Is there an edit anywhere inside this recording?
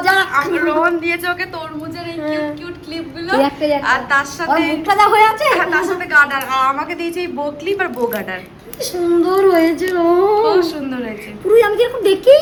no; 0 cuts

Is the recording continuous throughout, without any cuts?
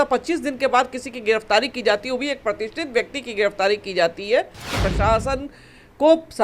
no; 1 cut; at 4.7 s

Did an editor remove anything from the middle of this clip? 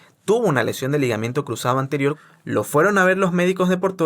yes; 1 cut; at 2.3 s

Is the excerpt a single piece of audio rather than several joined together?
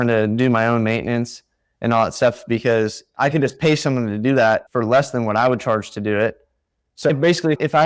yes; 0 cuts

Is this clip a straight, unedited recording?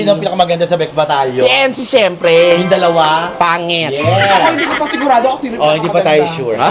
yes; 0 cuts

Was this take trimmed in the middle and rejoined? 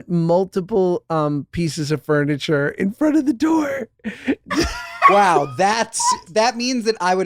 no; 0 cuts

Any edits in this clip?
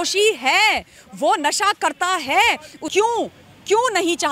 yes; 1 cut; at 2.8 s

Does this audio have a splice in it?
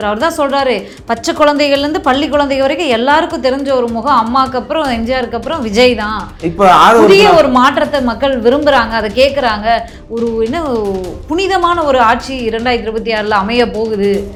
no; 0 cuts

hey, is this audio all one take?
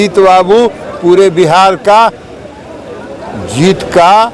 yes; 0 cuts

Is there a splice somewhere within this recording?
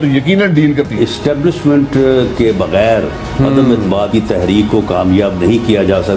no; 0 cuts

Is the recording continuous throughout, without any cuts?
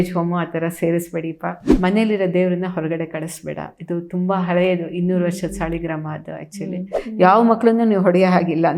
no; 2 cuts; at 1.6 s, 7.0 s

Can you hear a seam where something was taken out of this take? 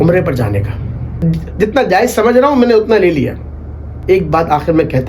yes; 2 cuts; at 1.2 s, 3.9 s

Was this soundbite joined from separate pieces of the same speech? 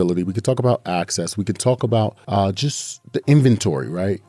yes; 1 cut; at 2.2 s

